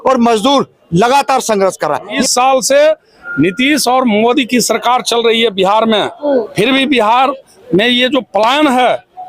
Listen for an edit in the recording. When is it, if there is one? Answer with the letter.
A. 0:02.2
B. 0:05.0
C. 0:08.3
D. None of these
A